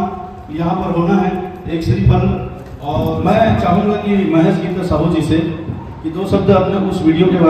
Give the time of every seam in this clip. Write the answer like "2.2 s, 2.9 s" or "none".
3.2 s

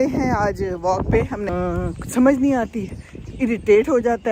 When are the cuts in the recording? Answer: 1.5 s

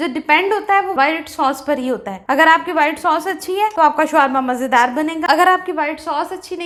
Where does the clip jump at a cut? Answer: none

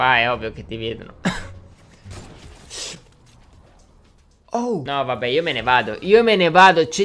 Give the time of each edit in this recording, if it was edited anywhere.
4.8 s

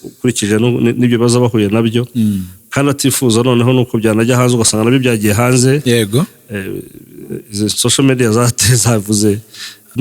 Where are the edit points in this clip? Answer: none

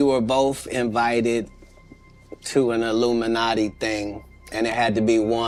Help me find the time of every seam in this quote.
none

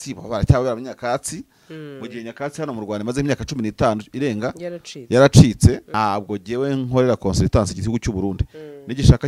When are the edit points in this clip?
5.9 s

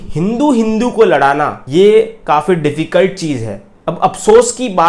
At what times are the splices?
none

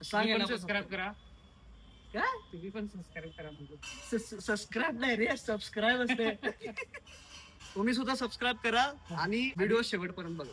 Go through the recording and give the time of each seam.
7.4 s, 9.5 s

